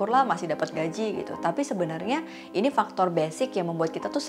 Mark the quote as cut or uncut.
uncut